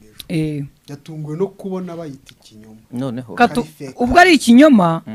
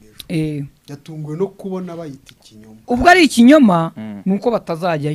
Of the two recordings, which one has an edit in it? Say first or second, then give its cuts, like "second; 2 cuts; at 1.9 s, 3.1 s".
second; 1 cut; at 2.7 s